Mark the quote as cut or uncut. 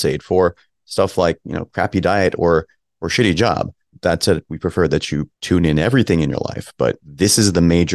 cut